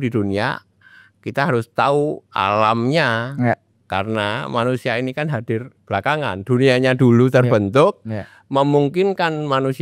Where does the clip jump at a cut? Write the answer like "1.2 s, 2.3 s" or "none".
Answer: none